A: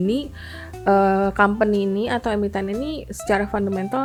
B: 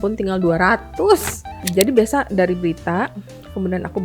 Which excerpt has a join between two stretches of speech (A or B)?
B